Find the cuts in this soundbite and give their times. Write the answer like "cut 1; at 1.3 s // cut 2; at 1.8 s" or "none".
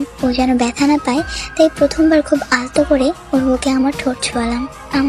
none